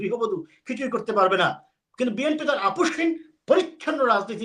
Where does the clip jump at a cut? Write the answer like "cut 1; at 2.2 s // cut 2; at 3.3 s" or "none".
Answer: none